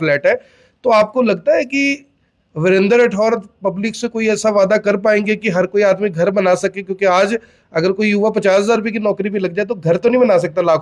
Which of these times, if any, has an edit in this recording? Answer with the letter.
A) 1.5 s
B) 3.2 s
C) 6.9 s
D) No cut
D